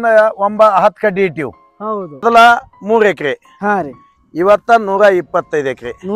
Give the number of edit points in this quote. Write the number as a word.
one